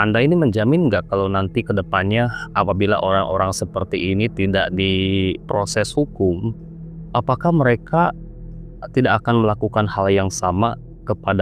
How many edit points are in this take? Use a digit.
0